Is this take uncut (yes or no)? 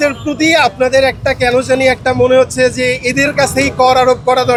yes